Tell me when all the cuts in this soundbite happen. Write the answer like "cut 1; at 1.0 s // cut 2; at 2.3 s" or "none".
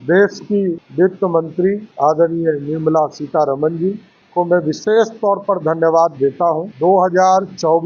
cut 1; at 0.8 s // cut 2; at 1.9 s // cut 3; at 4.1 s // cut 4; at 6.7 s